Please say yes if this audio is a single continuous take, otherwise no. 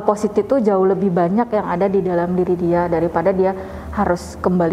yes